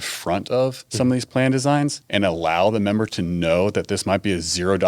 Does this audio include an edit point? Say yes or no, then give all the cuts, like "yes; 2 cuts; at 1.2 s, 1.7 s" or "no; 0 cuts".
yes; 2 cuts; at 0.8 s, 2.0 s